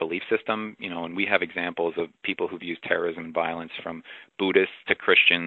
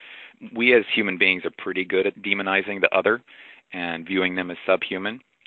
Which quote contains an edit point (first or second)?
second